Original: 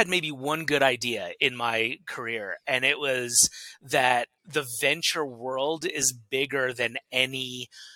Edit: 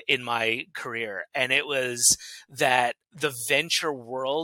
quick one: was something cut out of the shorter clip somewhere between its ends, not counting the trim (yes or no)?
no